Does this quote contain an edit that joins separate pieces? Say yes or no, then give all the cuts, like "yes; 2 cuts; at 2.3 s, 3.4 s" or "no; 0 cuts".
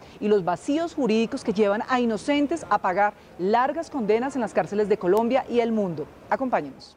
no; 0 cuts